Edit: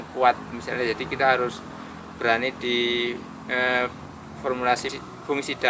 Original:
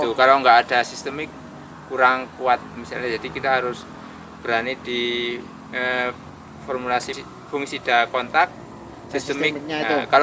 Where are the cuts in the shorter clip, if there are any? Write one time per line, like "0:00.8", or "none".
none